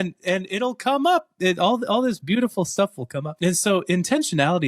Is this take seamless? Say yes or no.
no